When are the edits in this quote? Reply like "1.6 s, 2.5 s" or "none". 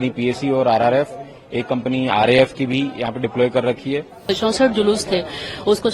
4.2 s

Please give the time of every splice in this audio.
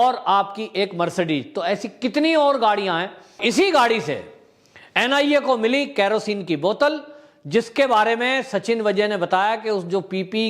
3.4 s

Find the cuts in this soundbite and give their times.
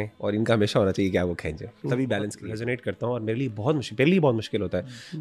2.4 s

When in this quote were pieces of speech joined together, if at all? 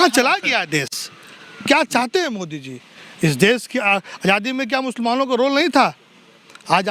none

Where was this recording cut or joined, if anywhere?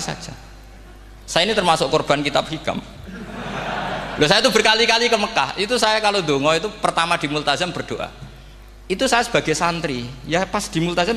none

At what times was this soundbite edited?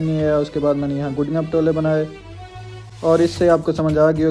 none

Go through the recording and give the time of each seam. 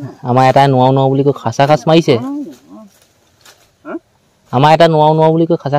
none

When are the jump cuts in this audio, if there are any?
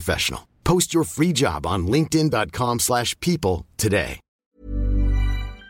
4.2 s

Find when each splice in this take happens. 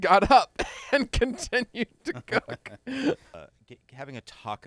3.4 s

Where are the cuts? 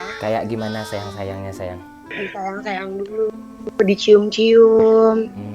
1.9 s

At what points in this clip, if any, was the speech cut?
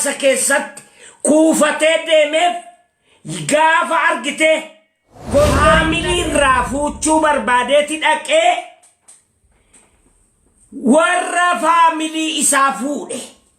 5.8 s

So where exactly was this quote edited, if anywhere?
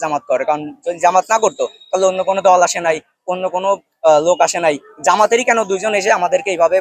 none

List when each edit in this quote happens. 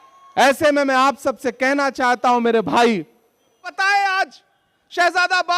3.7 s

